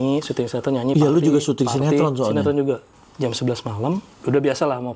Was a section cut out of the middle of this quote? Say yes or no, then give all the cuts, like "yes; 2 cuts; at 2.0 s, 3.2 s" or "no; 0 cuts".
yes; 2 cuts; at 2.9 s, 4.1 s